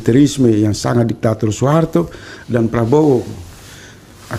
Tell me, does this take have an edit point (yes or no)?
no